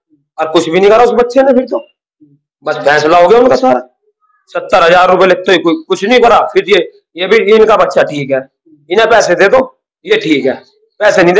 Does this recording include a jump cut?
no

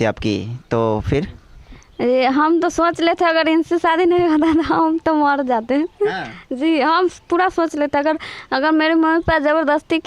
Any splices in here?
no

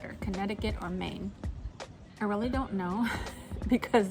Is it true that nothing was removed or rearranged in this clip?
yes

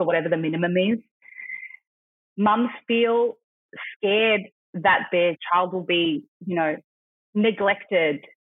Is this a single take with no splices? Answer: yes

